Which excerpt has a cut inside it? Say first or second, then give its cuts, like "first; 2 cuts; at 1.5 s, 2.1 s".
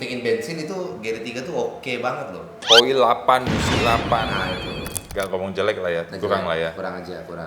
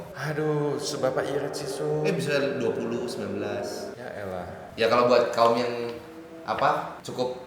first; 1 cut; at 5.0 s